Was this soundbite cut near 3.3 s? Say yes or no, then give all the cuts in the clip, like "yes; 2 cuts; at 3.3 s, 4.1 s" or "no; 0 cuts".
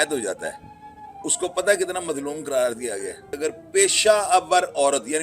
yes; 1 cut; at 3.3 s